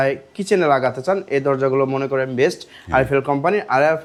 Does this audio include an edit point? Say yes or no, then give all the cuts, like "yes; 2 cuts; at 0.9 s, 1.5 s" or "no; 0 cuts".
no; 0 cuts